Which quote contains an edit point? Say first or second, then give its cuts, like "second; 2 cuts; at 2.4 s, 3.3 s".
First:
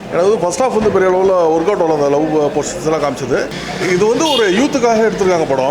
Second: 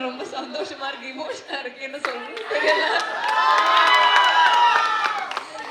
first; 1 cut; at 3.6 s